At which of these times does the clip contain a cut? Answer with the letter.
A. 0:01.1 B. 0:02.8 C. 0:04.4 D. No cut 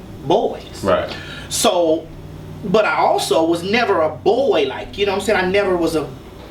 D